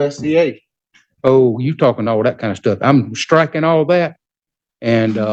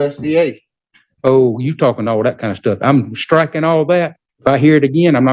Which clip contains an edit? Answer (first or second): second